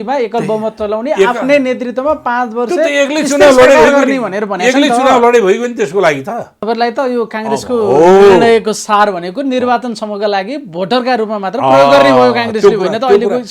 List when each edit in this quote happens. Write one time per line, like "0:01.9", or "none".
0:06.5